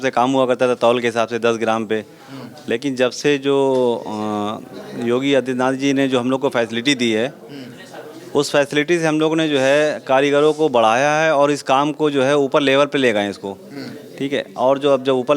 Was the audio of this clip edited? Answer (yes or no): no